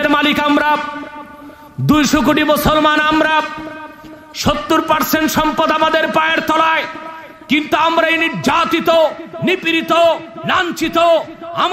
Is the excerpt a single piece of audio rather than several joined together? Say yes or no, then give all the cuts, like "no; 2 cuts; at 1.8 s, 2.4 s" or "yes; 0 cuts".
yes; 0 cuts